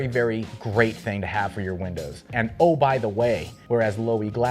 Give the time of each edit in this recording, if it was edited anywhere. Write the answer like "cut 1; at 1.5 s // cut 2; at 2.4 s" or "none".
cut 1; at 3.5 s